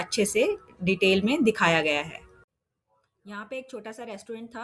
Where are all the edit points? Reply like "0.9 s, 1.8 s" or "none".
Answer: 2.5 s

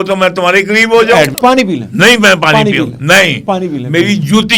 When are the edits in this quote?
1.3 s

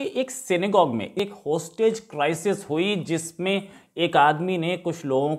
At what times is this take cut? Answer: 1.2 s

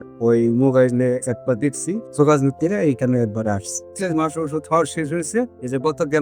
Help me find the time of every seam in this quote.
2.1 s, 3.9 s

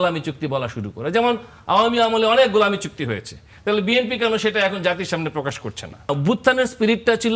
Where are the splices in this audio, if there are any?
6.1 s

